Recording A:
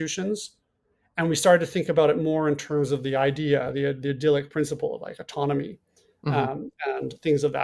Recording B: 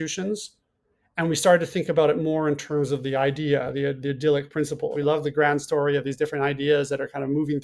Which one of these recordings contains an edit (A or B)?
B